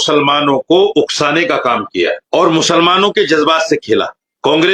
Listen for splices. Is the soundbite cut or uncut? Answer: uncut